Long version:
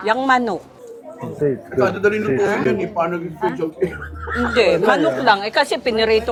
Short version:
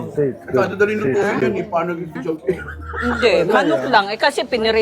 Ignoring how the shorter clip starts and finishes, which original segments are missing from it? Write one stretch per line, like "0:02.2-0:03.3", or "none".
0:03.4-0:03.5